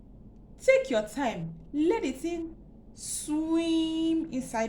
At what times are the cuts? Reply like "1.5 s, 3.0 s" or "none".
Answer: none